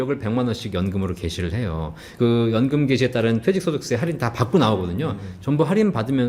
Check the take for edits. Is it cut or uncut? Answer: cut